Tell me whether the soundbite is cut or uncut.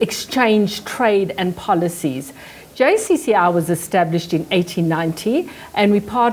uncut